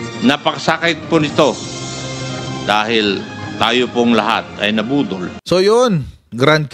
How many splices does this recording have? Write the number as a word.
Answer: one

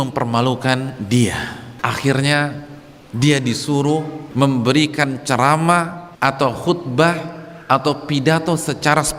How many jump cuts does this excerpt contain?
three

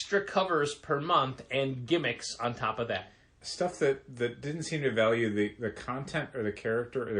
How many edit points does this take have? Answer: one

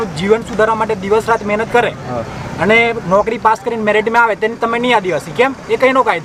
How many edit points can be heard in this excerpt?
zero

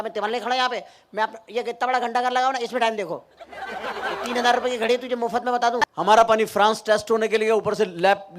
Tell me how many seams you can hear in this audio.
one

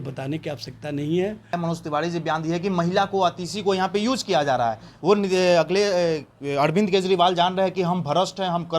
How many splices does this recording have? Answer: one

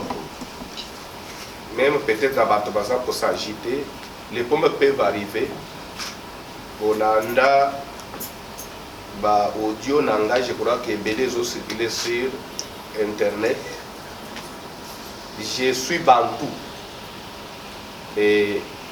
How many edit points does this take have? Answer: zero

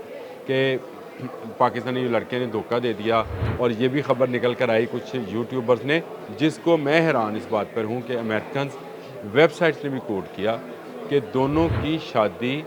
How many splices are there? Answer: two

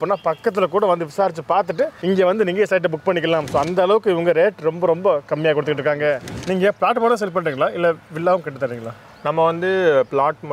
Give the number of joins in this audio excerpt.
one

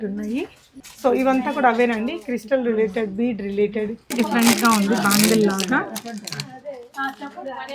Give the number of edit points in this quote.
one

